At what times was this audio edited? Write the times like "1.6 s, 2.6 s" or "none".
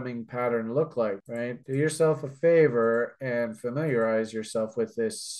1.3 s